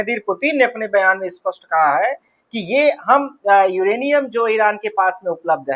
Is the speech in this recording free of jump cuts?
yes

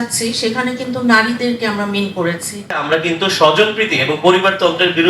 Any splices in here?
yes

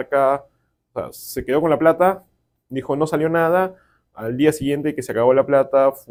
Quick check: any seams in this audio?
no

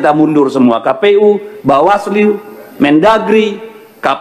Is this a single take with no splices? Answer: yes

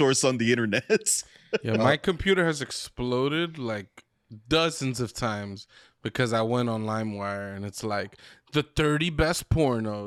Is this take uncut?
yes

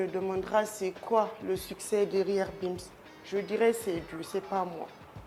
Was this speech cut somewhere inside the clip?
no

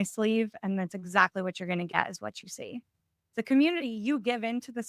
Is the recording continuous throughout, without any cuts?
no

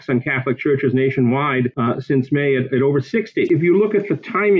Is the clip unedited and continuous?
no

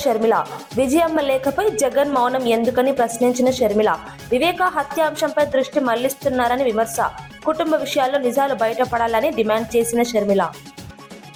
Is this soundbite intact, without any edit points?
yes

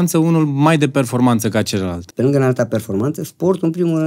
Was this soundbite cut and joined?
yes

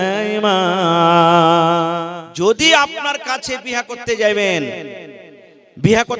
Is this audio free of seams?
no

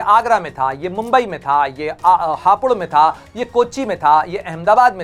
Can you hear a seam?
no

